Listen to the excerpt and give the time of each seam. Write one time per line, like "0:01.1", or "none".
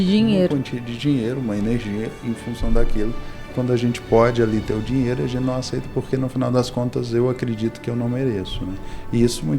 0:03.5